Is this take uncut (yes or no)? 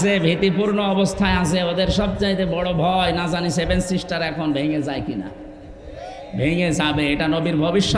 yes